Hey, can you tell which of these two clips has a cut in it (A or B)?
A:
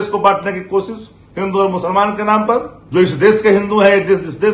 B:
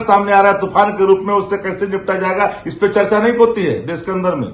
A